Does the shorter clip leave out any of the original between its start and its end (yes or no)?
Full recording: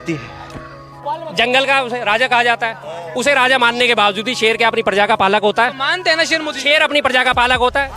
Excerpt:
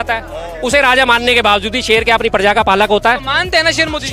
no